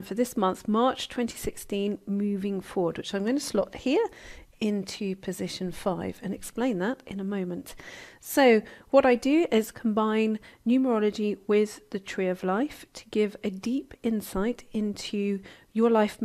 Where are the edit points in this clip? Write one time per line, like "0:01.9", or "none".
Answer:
none